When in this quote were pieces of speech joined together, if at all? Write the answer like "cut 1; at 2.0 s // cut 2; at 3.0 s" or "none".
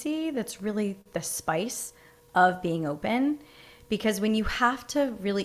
none